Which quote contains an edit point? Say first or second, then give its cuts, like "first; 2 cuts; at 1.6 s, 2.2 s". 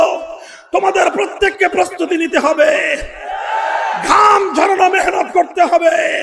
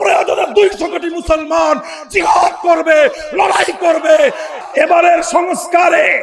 second; 1 cut; at 4.5 s